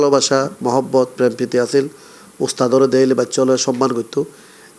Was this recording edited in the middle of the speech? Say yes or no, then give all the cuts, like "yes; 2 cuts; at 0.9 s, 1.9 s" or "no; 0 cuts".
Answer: no; 0 cuts